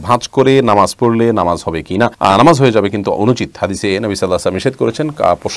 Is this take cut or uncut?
uncut